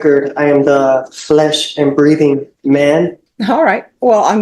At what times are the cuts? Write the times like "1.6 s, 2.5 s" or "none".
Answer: 3.3 s